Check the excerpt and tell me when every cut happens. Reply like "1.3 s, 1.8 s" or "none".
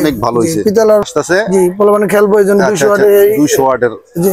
1.0 s